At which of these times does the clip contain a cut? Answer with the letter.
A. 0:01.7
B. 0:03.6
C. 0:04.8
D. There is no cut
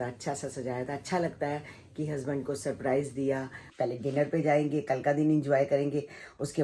B